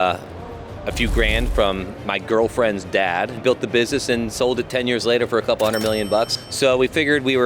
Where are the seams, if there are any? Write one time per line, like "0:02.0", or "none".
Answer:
0:03.4
0:06.3